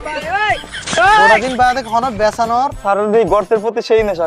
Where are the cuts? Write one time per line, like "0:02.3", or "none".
0:01.3
0:02.8

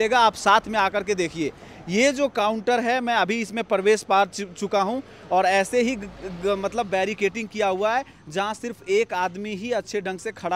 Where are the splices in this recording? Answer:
none

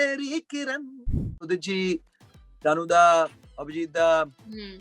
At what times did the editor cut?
0:01.4

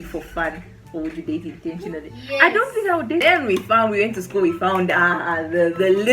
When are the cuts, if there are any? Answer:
0:03.2

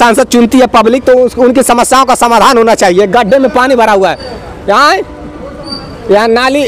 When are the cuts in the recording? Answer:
none

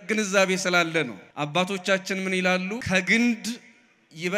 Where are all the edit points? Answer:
0:01.2
0:02.8

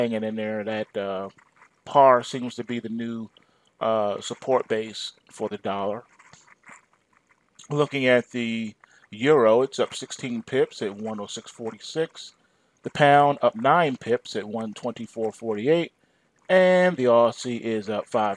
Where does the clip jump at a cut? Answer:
0:02.5

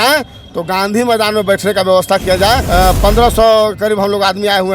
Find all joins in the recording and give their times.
0:02.6

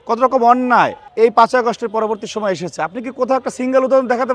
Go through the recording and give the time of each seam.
0:01.0

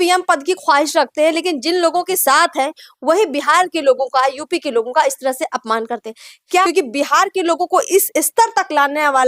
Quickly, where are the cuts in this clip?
0:06.6

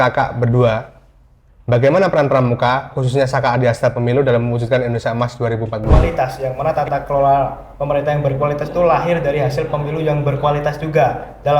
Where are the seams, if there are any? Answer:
0:06.0

